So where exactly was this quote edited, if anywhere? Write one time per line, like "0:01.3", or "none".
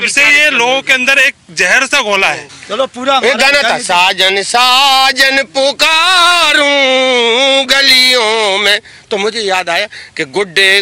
0:02.5